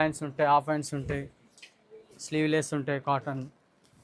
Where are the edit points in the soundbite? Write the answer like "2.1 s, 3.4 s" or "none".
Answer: none